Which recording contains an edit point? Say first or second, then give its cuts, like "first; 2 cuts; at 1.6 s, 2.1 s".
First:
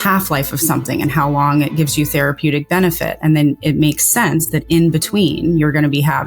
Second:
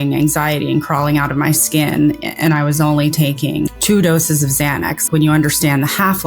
second; 2 cuts; at 3.7 s, 5.0 s